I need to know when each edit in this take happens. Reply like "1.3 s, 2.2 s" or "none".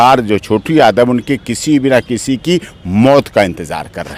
none